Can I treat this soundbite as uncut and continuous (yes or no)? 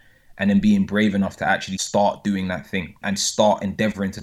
no